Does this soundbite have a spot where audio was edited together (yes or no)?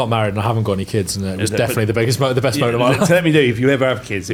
no